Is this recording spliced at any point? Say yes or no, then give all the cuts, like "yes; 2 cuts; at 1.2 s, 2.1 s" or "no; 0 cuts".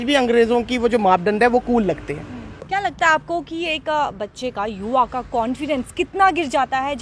no; 0 cuts